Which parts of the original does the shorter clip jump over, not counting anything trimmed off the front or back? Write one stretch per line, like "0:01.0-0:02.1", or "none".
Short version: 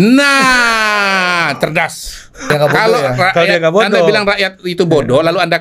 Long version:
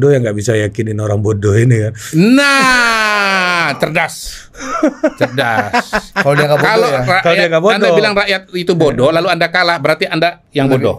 0:04.7-0:06.4